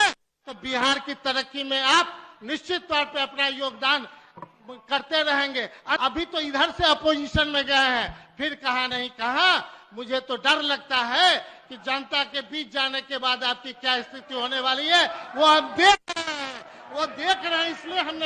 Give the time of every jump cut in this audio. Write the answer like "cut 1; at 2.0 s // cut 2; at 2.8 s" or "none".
cut 1; at 6.0 s